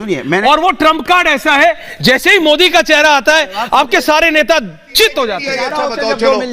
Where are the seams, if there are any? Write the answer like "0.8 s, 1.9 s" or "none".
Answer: 5.5 s